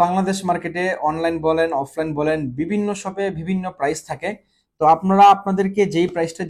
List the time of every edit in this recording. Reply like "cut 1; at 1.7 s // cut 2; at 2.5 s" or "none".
none